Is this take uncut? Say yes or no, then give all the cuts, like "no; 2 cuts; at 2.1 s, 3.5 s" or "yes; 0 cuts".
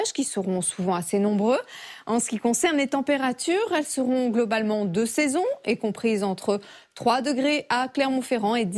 no; 1 cut; at 7.6 s